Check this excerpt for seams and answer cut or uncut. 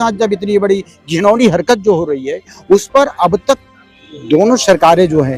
uncut